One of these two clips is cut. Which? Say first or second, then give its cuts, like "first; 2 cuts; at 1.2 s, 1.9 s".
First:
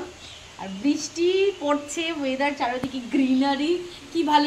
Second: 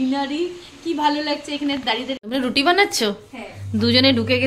second; 1 cut; at 2.2 s